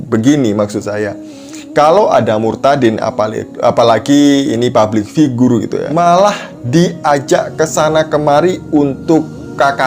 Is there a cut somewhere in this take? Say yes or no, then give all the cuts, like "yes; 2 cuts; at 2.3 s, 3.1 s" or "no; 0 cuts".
yes; 1 cut; at 5.8 s